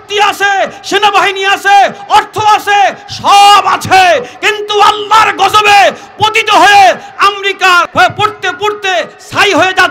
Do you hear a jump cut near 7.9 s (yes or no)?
yes